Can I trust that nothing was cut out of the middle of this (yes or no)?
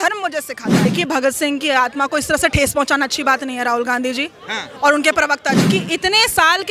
no